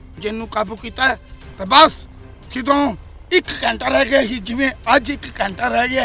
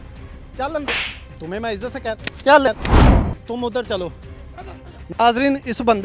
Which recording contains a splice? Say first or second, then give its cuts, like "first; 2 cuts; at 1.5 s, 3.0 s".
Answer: second; 1 cut; at 2.9 s